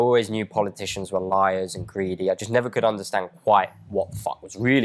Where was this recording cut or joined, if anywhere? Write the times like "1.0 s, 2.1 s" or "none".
none